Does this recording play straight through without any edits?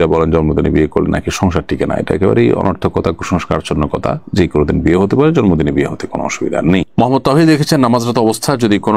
yes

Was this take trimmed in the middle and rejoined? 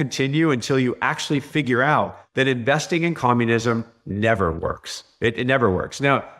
no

